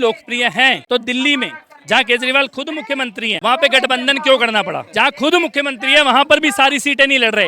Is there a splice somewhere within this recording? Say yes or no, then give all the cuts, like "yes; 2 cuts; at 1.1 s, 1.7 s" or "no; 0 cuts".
yes; 1 cut; at 3.3 s